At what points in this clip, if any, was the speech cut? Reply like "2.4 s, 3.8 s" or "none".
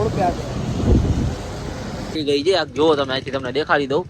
2.1 s